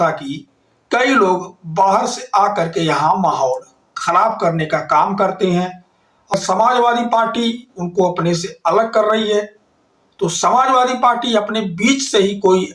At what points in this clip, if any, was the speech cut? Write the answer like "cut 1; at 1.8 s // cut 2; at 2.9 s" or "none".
cut 1; at 6.3 s